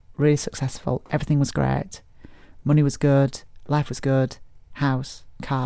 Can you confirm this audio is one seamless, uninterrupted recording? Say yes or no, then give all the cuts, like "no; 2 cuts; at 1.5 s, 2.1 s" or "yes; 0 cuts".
no; 1 cut; at 4.7 s